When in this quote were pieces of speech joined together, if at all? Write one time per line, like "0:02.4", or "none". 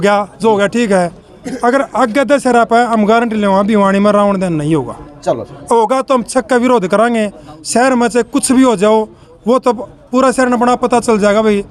none